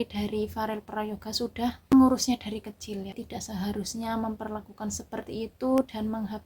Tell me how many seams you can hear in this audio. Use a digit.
2